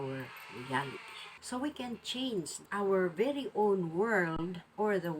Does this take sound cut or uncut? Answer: cut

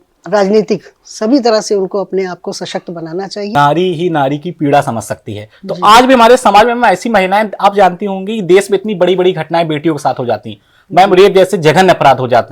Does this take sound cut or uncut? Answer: cut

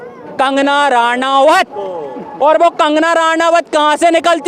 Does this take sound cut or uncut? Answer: uncut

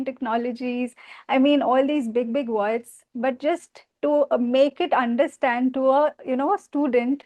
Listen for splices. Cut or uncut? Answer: uncut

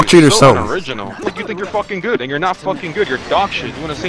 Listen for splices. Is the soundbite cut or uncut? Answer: cut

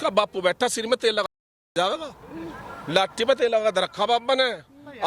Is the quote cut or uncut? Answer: uncut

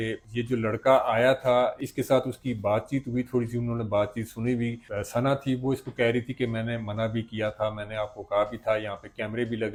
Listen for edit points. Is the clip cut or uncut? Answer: uncut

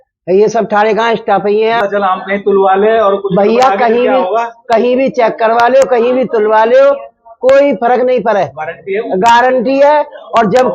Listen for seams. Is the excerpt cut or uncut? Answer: cut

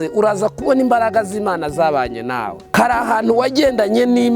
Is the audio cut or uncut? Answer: cut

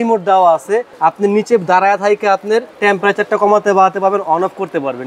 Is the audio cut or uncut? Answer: cut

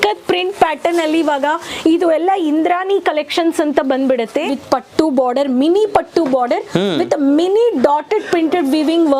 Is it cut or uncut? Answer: cut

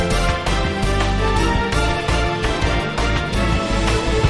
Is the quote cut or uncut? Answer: uncut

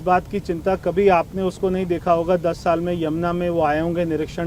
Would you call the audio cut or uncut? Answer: uncut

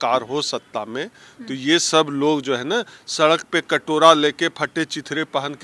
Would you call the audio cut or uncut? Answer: uncut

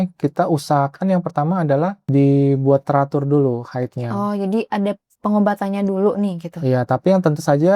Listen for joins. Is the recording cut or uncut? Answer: cut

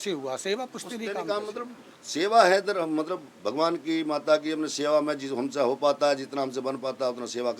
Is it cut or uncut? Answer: uncut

